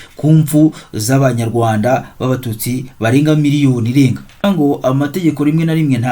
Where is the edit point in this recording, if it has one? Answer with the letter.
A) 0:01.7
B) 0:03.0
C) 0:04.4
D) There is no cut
C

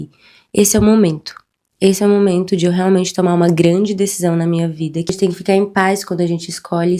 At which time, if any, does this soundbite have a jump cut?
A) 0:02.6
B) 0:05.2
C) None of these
B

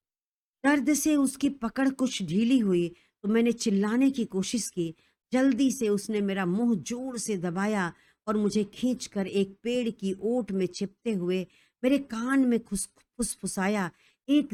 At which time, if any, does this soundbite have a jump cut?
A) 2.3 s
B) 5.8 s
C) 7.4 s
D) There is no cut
D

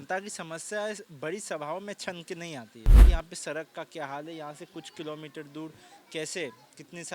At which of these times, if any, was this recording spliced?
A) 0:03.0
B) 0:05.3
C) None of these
A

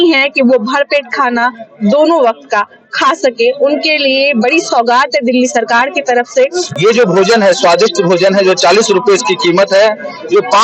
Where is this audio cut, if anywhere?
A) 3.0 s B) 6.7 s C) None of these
B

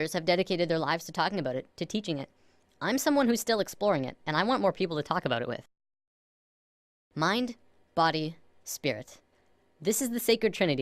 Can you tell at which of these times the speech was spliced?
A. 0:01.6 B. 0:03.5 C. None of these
B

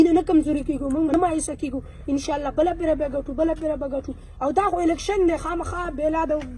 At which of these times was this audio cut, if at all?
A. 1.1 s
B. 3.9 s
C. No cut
A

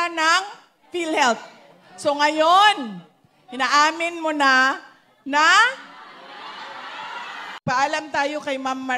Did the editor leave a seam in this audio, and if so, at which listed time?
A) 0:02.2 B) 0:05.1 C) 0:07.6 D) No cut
C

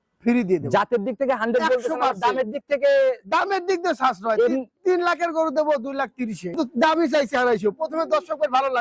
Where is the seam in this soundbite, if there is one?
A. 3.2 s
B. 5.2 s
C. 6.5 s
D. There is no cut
C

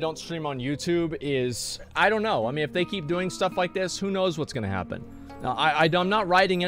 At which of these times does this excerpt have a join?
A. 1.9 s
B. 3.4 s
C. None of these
A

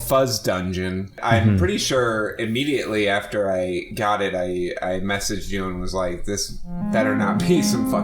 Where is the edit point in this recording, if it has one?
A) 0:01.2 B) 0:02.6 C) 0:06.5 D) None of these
A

